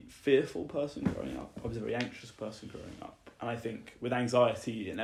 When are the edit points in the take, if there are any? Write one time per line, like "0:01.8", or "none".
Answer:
none